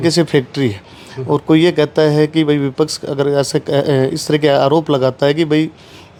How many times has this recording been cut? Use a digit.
0